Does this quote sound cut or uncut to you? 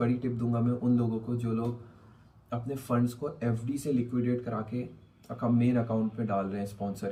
uncut